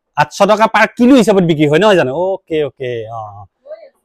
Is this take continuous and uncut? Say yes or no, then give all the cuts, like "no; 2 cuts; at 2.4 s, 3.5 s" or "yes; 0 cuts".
yes; 0 cuts